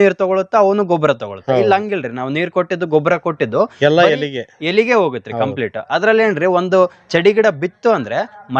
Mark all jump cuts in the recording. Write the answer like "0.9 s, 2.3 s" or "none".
none